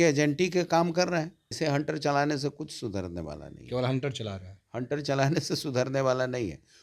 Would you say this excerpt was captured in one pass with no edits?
no; 1 cut; at 1.6 s

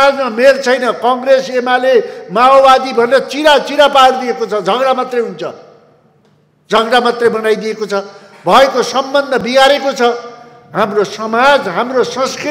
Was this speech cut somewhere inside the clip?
no; 0 cuts

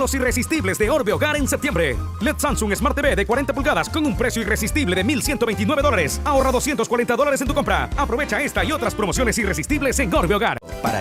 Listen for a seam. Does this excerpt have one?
no; 0 cuts

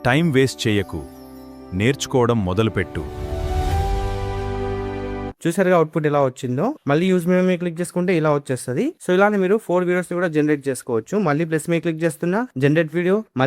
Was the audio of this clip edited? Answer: no; 0 cuts

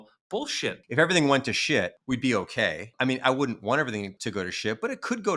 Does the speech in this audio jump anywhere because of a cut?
yes; 4 cuts; at 0.8 s, 2.0 s, 2.9 s, 4.2 s

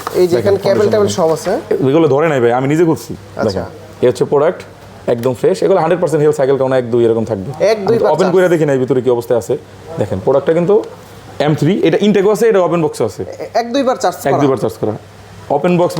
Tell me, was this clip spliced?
no; 0 cuts

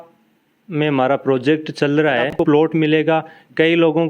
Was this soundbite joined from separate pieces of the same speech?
yes; 1 cut; at 2.4 s

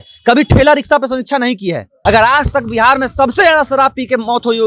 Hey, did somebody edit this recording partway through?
yes; 1 cut; at 1.9 s

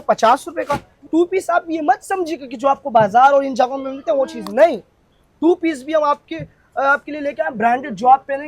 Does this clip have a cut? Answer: yes; 1 cut; at 1.1 s

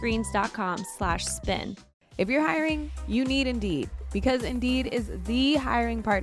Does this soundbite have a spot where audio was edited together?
yes; 1 cut; at 1.8 s

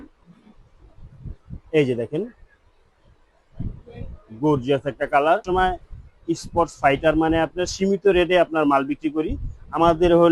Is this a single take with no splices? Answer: no; 1 cut; at 5.4 s

